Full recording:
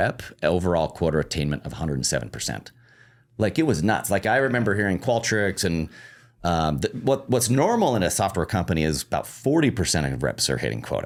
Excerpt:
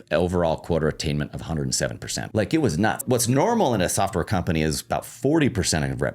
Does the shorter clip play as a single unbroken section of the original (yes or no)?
no